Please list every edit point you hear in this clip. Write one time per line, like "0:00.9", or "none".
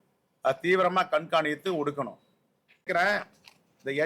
0:02.9